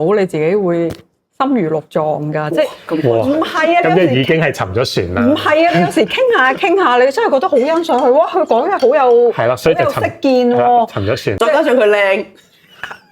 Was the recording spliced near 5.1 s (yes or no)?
no